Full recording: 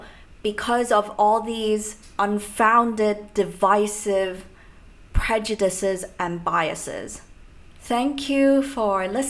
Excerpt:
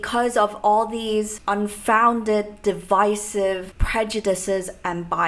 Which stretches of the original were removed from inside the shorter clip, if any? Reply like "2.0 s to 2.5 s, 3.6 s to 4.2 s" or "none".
1.9 s to 2.1 s, 4.5 s to 5.1 s